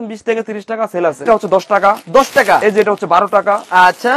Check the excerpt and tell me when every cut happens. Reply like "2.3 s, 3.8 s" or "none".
1.3 s